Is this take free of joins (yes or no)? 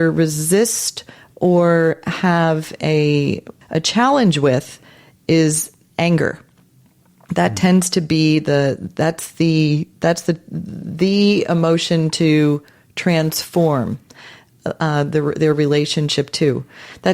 no